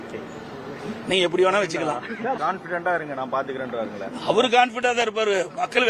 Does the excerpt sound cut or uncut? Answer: cut